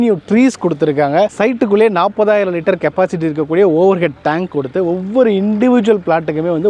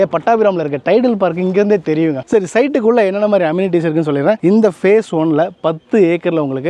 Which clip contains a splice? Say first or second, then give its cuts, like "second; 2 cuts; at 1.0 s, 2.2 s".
second; 1 cut; at 2.3 s